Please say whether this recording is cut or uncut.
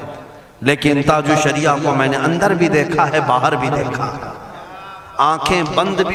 uncut